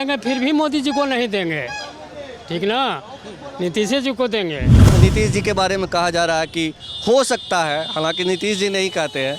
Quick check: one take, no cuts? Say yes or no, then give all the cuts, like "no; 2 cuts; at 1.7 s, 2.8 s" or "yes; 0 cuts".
no; 1 cut; at 4.8 s